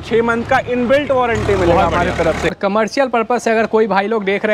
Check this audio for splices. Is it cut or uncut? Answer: cut